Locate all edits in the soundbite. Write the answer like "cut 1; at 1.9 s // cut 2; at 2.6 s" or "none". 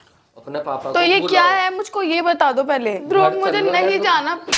cut 1; at 3.0 s